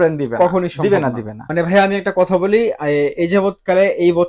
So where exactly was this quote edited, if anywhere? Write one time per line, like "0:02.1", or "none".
0:01.4